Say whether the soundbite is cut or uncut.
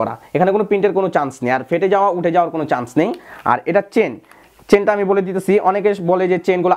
uncut